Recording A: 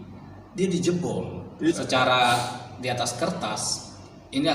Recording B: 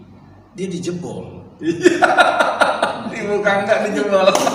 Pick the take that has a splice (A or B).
A